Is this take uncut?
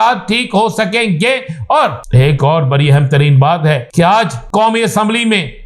no; 2 cuts; at 2.0 s, 4.1 s

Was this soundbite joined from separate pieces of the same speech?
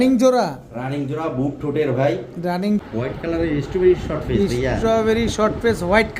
yes; 1 cut; at 2.8 s

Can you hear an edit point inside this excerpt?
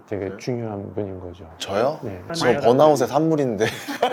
no; 0 cuts

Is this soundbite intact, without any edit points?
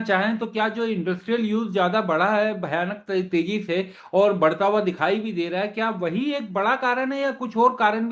yes; 0 cuts

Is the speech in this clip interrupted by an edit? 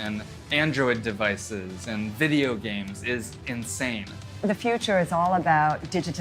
yes; 1 cut; at 4.4 s

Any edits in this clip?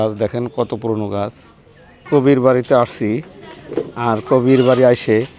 yes; 1 cut; at 2.0 s

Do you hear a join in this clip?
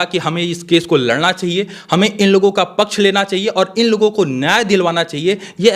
no; 0 cuts

